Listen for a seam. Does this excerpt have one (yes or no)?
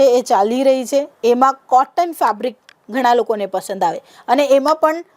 no